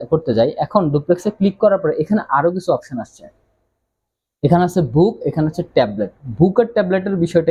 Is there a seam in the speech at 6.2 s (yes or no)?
no